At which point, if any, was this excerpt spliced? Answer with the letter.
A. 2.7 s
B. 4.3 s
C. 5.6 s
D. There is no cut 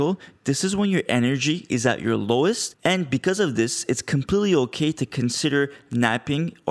A